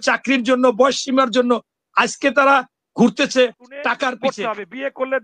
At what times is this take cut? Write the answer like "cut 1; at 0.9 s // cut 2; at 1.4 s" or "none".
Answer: cut 1; at 4.1 s